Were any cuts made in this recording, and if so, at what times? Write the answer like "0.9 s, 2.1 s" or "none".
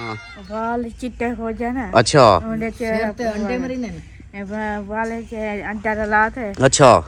none